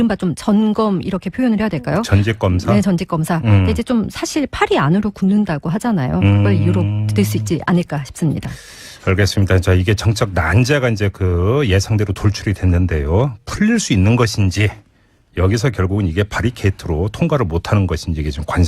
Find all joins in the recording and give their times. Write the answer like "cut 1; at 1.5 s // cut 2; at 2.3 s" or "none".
cut 1; at 14.2 s